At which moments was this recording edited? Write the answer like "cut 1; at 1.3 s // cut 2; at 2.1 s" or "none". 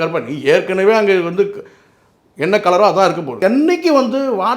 cut 1; at 3.4 s